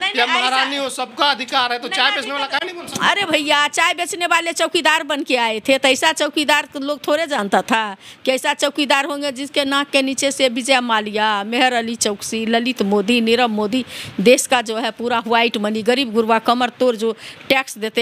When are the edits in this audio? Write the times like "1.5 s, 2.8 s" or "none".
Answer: none